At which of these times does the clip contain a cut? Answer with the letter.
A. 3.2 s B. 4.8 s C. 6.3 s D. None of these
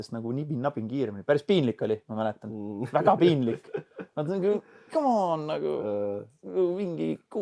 D